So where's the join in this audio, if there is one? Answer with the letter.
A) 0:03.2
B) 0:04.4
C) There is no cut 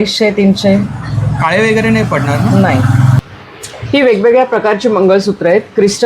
A